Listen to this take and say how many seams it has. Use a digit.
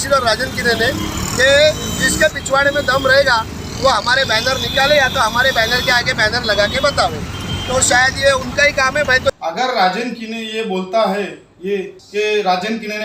2